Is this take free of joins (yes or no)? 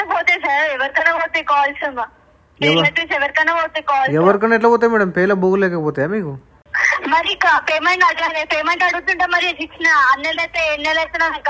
no